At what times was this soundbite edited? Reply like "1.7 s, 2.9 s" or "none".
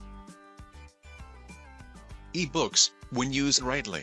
2.3 s